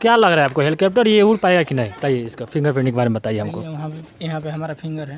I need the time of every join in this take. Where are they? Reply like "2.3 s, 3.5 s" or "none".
1.9 s